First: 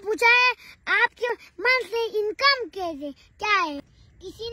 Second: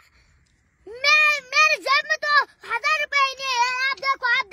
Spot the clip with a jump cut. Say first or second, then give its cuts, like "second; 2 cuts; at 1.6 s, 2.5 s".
first; 2 cuts; at 1.3 s, 3.8 s